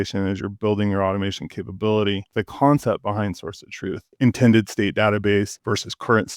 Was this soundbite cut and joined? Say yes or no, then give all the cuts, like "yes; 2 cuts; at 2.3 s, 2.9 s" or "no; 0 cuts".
yes; 3 cuts; at 2.3 s, 4.1 s, 5.6 s